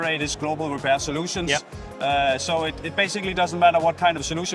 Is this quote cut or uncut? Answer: uncut